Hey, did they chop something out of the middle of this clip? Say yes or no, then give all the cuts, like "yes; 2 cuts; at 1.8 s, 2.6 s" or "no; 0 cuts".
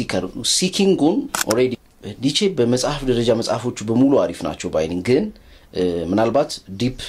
yes; 1 cut; at 1.8 s